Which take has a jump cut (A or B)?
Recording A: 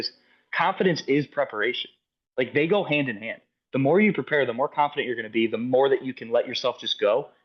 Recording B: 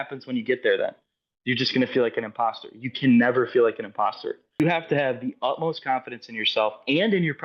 B